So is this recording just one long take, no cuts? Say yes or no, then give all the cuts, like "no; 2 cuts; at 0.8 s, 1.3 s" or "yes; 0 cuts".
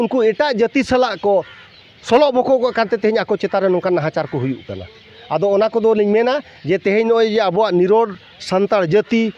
yes; 0 cuts